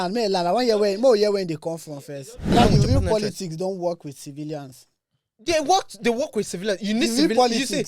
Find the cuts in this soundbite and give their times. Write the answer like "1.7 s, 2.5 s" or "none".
2.5 s